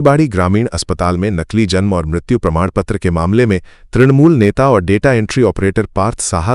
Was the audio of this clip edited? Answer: no; 0 cuts

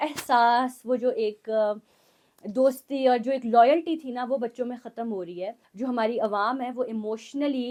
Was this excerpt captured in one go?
yes; 0 cuts

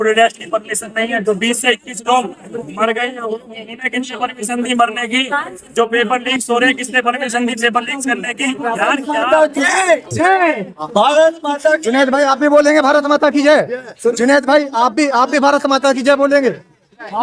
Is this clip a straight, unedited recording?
no; 1 cut; at 9.1 s

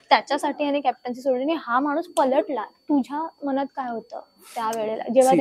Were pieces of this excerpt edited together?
no; 0 cuts

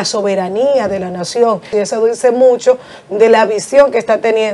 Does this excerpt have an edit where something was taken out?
yes; 1 cut; at 1.7 s

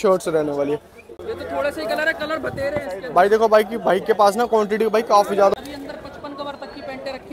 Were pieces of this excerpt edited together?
yes; 2 cuts; at 1.0 s, 5.5 s

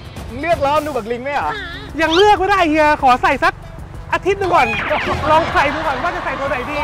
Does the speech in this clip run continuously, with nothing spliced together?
yes; 0 cuts

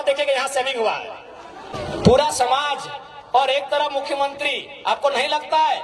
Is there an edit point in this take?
yes; 1 cut; at 1.7 s

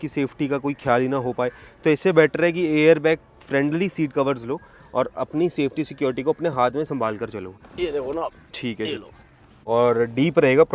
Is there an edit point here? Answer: yes; 2 cuts; at 7.6 s, 9.5 s

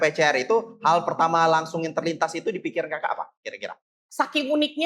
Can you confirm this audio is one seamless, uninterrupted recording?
no; 1 cut; at 4.0 s

